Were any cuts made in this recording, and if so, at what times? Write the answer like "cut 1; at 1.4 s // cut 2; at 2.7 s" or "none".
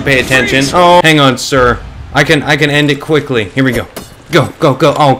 cut 1; at 1.0 s